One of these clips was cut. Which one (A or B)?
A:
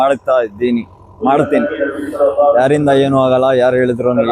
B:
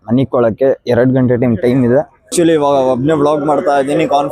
B